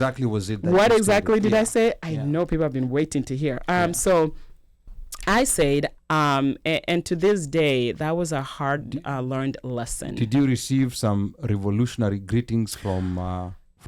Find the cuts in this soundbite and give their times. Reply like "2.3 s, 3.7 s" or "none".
5.9 s